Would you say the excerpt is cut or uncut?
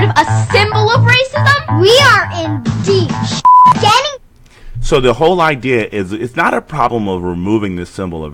uncut